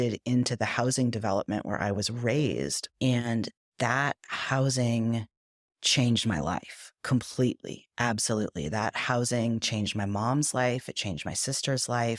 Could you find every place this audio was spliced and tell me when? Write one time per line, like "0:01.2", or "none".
0:02.8